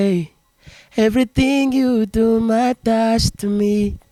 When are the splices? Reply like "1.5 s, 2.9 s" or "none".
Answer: none